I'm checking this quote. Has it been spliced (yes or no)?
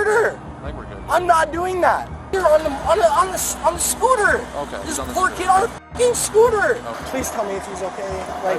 yes